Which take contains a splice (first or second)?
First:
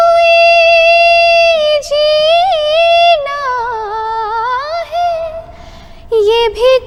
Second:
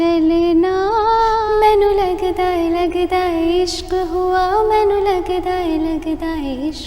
second